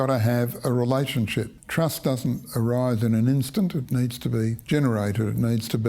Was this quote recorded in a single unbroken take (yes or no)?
no